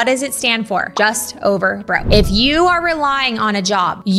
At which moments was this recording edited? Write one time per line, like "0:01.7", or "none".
0:00.9